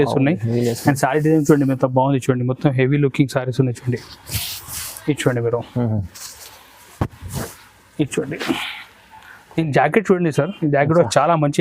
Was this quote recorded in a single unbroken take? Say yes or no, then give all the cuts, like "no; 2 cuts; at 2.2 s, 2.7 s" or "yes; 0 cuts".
yes; 0 cuts